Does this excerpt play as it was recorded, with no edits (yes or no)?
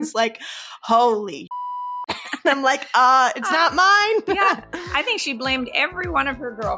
yes